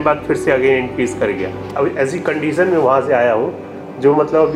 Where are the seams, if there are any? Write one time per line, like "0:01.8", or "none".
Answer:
0:01.7